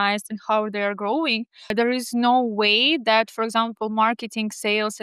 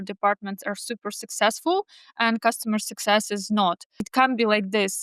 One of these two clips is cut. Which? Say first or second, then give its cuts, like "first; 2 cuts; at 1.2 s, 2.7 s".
second; 1 cut; at 4.1 s